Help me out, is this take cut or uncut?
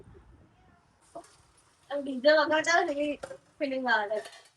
cut